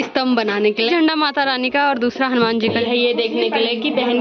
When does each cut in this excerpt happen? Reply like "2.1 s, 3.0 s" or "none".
0.9 s, 2.8 s